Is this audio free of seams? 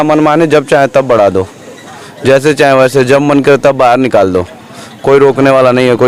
yes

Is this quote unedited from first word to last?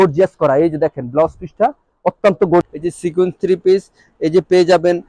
no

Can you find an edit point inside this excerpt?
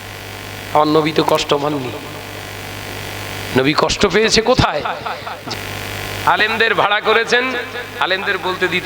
yes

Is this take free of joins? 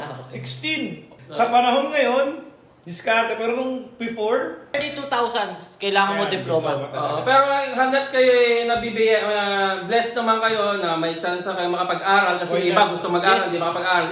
no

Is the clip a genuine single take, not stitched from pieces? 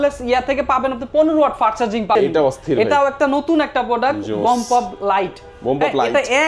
no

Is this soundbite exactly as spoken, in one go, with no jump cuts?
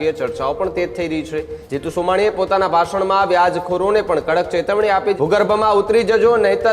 no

